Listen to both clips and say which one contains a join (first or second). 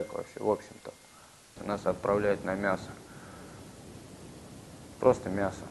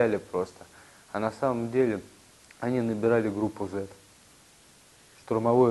first